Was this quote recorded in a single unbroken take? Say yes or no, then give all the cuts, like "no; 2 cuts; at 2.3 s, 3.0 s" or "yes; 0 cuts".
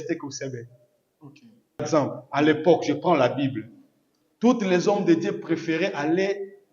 no; 1 cut; at 1.8 s